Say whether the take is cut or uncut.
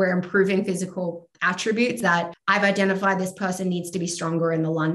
cut